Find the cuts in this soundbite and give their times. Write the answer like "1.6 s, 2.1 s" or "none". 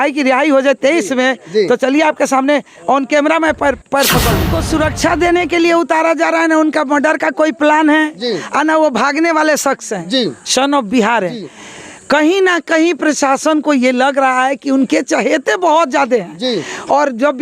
4.6 s